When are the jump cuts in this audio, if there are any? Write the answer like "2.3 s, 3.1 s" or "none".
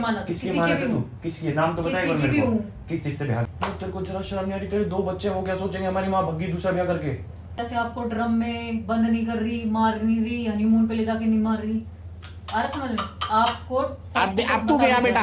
3.4 s, 7.6 s